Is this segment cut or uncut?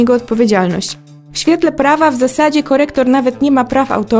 cut